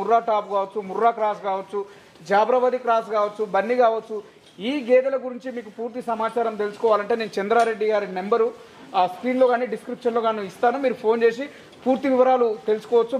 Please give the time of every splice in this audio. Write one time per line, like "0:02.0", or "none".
none